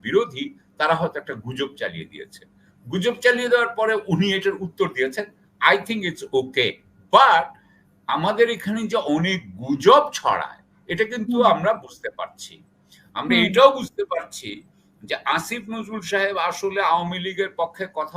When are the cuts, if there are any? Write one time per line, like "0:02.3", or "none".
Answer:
none